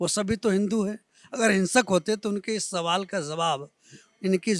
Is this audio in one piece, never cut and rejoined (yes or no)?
yes